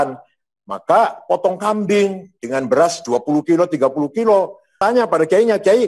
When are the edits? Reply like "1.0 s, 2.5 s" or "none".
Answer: 4.8 s